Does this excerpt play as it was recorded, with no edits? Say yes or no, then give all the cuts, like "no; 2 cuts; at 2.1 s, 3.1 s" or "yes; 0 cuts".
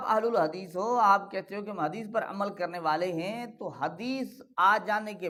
yes; 0 cuts